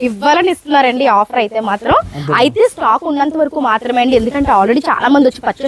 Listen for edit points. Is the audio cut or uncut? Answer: uncut